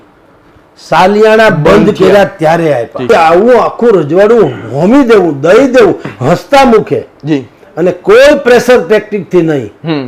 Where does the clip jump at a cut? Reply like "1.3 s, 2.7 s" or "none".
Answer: 3.1 s